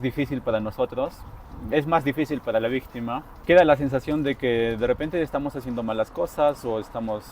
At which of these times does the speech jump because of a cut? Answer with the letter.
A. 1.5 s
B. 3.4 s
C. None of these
B